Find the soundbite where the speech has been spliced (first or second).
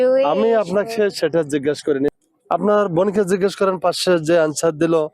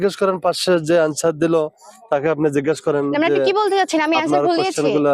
first